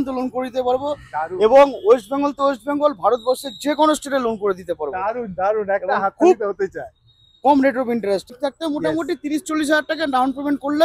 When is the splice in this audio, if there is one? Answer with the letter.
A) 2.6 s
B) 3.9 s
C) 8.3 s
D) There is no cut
C